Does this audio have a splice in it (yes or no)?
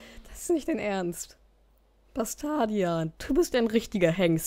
yes